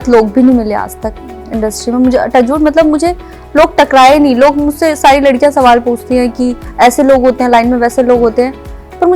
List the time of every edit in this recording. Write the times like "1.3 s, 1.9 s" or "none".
none

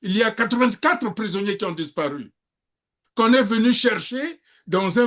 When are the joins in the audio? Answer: none

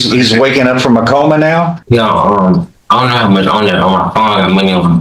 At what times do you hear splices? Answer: 1.8 s

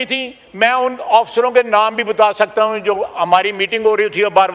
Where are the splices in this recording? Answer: none

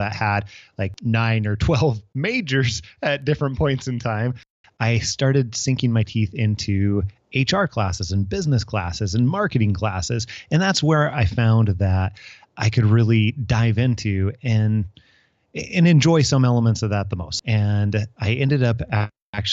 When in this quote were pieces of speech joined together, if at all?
0.9 s, 4.5 s, 17.2 s

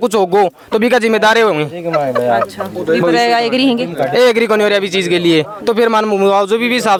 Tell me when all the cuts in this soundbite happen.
none

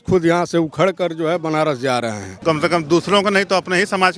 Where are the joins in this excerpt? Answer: 2.3 s

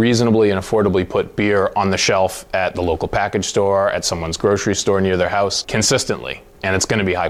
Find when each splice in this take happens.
none

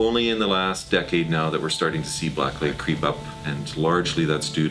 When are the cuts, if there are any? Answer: 2.8 s

